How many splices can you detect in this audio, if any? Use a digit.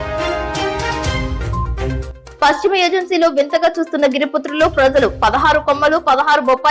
0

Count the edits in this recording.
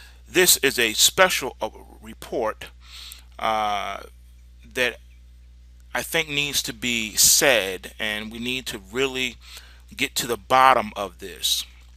1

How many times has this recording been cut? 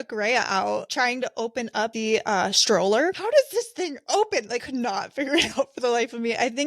4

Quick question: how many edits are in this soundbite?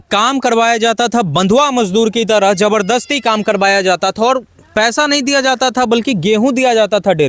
0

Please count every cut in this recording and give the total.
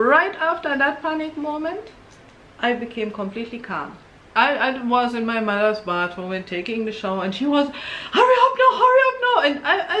1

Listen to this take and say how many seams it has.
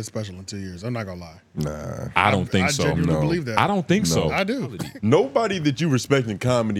1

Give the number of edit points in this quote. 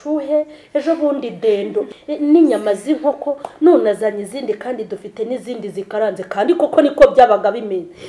1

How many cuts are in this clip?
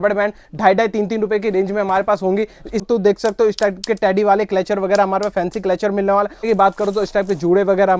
2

